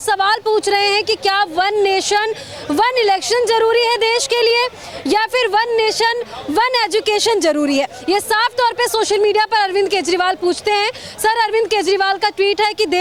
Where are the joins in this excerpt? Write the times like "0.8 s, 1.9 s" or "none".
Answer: none